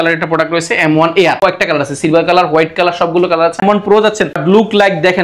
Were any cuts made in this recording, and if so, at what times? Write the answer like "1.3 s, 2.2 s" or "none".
1.4 s, 3.6 s